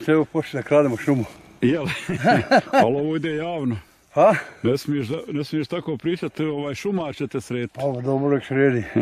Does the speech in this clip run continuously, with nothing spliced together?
yes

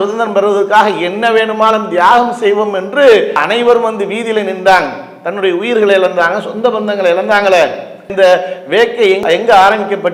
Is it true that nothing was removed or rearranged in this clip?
yes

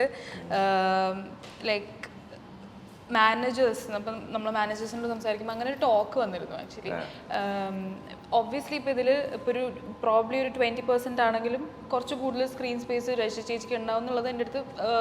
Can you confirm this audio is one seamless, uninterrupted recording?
yes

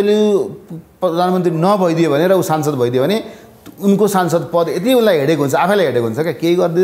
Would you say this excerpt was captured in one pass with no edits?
yes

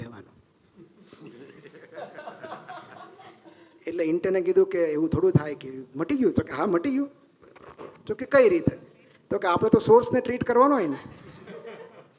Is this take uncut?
yes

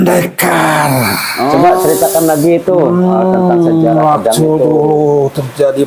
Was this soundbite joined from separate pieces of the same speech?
yes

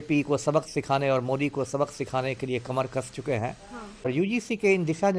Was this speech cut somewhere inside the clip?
yes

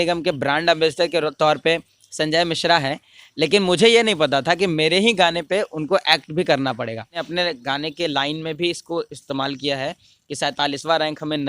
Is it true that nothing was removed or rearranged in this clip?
no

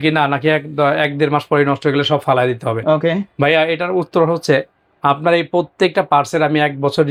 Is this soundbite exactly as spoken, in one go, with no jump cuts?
yes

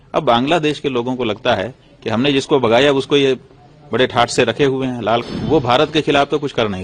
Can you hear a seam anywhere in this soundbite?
yes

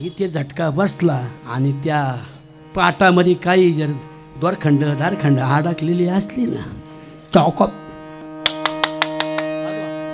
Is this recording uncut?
no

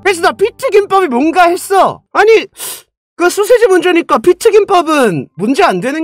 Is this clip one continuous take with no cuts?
no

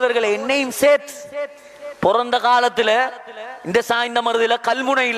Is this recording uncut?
yes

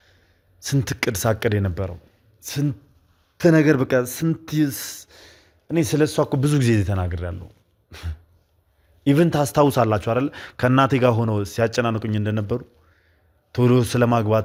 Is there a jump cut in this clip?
no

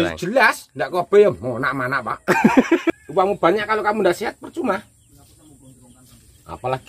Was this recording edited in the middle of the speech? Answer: yes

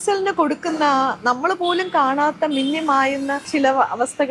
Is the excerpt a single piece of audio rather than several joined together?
no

